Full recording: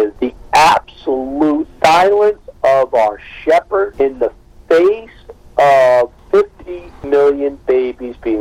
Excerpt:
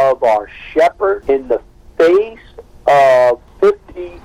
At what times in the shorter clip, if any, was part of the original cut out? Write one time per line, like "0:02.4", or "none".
none